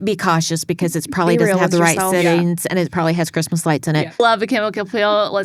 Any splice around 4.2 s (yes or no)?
yes